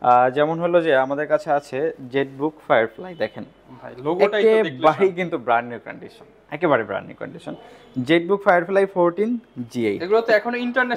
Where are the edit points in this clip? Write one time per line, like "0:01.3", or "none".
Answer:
none